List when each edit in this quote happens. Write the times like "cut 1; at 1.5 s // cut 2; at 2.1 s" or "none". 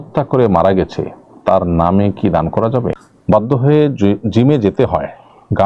cut 1; at 3.0 s